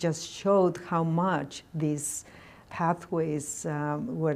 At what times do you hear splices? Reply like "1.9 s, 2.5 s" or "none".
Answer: 2.7 s